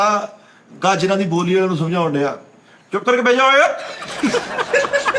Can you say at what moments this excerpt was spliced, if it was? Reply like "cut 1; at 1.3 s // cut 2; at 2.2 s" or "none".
none